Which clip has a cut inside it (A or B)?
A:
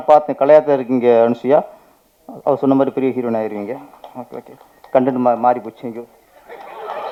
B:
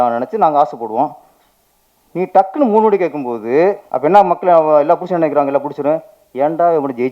B